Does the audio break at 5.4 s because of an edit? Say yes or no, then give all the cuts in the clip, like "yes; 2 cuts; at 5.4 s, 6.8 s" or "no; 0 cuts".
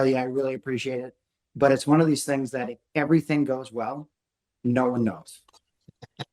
yes; 1 cut; at 5.4 s